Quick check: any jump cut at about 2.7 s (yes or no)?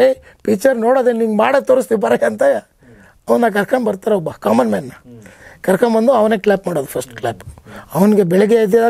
no